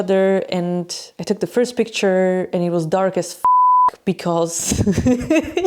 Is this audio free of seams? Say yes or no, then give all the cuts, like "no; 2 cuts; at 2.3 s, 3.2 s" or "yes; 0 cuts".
yes; 0 cuts